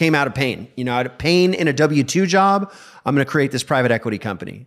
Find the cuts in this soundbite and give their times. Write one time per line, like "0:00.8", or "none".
none